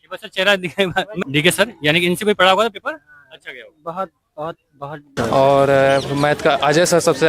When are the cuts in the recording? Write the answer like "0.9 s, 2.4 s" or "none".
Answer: 1.2 s, 5.1 s